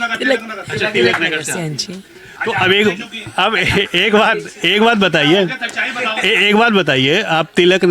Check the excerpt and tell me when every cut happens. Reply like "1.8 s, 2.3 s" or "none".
none